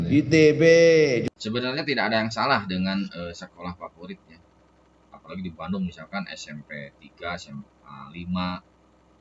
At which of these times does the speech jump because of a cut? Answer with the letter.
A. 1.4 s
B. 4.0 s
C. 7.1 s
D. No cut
A